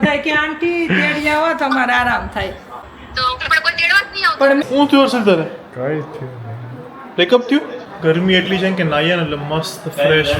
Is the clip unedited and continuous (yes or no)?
no